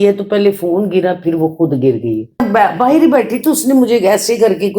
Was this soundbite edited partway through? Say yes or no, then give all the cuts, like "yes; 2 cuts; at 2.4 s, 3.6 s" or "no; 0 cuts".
yes; 1 cut; at 2.4 s